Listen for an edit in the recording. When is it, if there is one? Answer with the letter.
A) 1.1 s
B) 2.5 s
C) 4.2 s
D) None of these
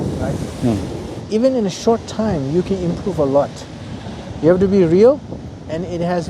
C